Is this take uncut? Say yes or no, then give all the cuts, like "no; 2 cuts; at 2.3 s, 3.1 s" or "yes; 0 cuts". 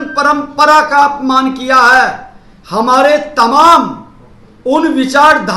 yes; 0 cuts